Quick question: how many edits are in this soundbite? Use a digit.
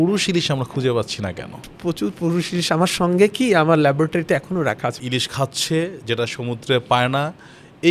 2